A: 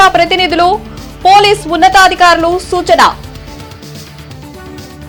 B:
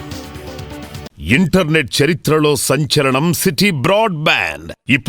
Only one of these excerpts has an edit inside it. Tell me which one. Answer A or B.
B